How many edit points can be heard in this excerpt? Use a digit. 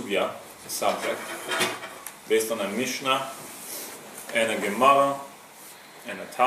1